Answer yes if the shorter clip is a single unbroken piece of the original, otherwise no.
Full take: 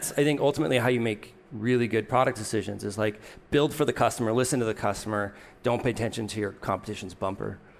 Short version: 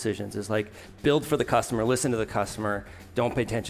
yes